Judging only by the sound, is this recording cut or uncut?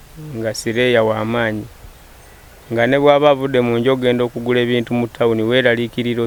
uncut